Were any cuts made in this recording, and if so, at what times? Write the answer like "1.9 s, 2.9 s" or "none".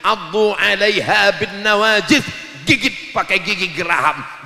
none